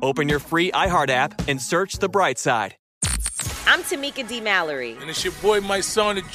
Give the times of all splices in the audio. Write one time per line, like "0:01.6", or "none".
0:02.8